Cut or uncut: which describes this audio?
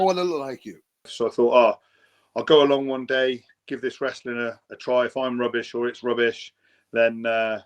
cut